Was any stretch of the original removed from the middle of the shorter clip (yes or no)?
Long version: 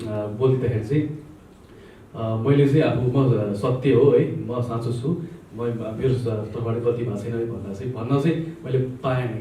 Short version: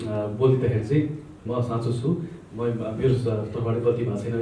yes